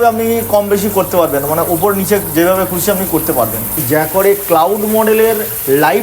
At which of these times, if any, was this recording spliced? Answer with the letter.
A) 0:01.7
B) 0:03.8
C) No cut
B